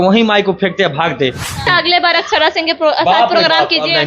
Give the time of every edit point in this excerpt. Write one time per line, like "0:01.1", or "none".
0:01.6